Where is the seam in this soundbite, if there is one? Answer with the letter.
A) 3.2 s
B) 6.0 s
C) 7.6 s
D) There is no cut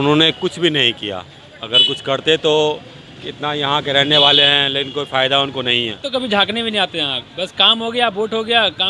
B